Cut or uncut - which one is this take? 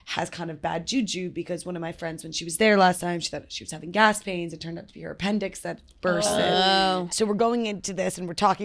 cut